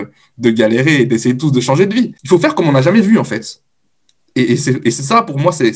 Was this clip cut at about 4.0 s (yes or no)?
no